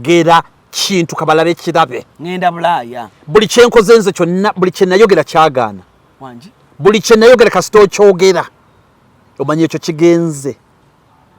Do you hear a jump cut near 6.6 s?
no; 0 cuts

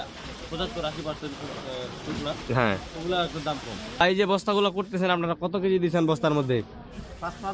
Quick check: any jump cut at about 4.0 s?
yes; 1 cut; at 4.0 s

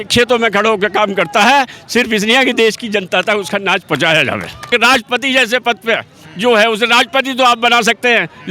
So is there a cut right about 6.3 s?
no; 1 cut; at 5.0 s

